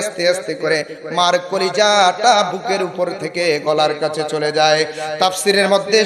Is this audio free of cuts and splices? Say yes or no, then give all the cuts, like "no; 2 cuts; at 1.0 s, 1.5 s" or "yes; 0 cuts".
yes; 0 cuts